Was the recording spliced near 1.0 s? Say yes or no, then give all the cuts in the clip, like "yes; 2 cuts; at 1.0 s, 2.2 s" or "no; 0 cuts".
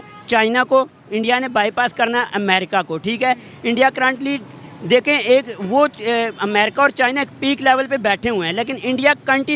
no; 0 cuts